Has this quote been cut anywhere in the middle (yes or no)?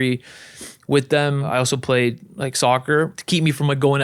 yes